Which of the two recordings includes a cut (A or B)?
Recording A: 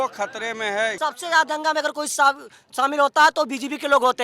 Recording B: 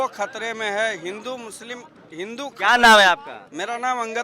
A